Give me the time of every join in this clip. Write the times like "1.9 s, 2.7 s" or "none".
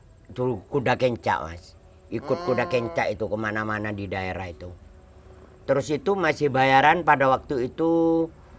none